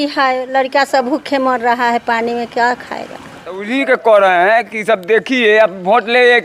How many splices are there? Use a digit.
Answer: 1